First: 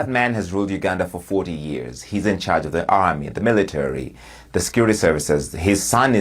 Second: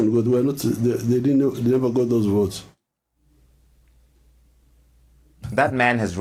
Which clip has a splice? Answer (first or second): first